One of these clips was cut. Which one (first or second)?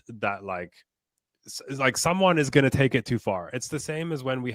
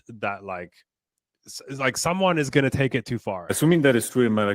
second